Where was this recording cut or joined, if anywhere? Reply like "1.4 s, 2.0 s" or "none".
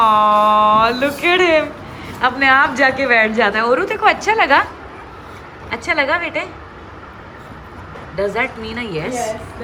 none